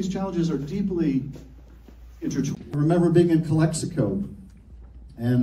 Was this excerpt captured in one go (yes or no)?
yes